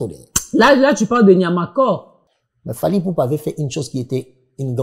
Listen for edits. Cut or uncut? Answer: cut